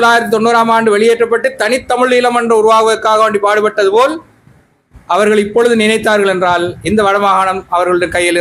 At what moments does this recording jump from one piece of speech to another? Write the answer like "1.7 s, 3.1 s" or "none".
none